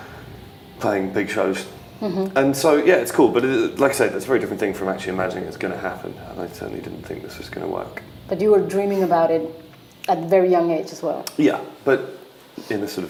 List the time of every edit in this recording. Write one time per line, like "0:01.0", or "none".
none